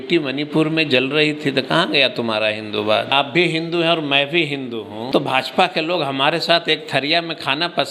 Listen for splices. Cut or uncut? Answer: cut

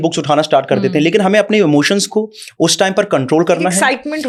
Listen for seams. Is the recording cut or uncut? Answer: uncut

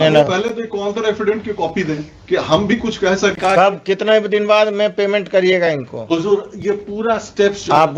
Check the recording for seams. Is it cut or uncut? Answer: cut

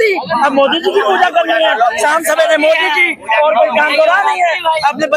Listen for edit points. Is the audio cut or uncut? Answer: uncut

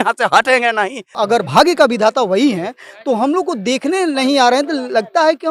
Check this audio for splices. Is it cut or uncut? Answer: cut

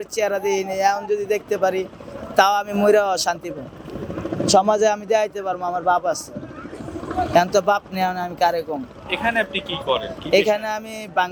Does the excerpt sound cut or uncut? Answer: uncut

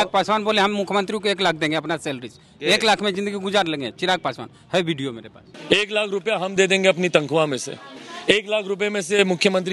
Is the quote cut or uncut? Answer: uncut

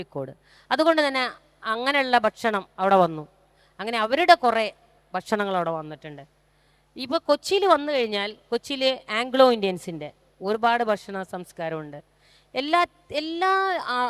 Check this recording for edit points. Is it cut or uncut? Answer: uncut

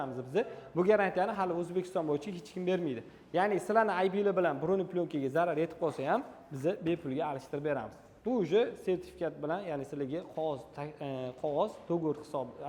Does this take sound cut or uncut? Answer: uncut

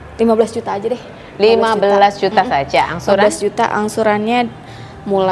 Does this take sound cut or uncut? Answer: uncut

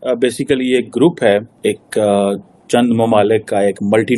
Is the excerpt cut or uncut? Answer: cut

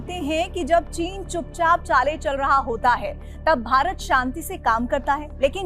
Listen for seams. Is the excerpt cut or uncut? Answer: uncut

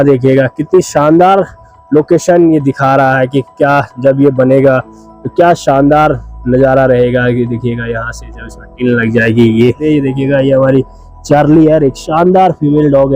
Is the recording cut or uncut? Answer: cut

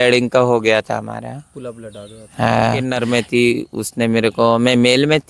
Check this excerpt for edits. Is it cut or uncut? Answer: cut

